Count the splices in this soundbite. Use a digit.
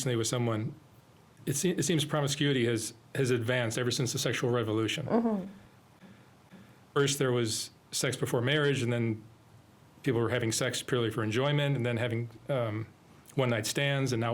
0